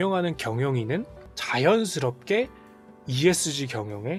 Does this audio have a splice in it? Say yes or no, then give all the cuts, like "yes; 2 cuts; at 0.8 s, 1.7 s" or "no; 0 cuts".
no; 0 cuts